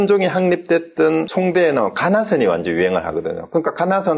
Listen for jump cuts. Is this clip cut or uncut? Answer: cut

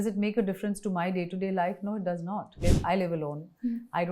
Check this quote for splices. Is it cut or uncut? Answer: cut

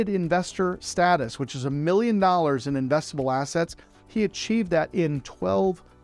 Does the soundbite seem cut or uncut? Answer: uncut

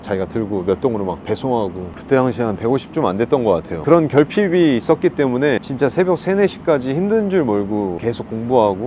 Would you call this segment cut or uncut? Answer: cut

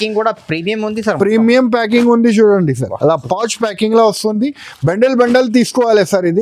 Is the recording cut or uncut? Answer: uncut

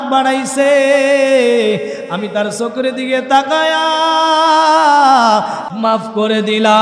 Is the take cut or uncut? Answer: cut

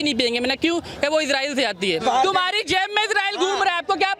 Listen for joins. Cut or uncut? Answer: cut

